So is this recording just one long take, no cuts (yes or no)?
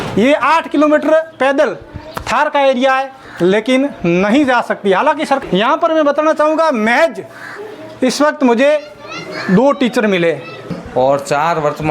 no